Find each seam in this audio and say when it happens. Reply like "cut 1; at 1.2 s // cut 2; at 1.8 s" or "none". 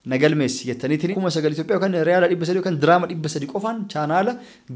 cut 1; at 1.1 s